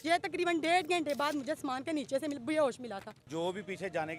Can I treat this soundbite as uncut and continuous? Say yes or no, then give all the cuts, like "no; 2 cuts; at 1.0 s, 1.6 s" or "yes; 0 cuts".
no; 1 cut; at 3.3 s